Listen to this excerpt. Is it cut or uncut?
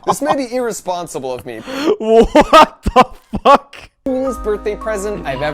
cut